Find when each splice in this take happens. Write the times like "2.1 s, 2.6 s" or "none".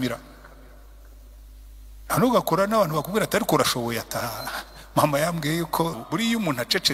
6.0 s